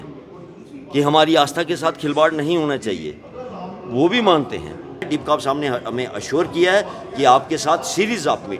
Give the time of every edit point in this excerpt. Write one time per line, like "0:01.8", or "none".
0:05.1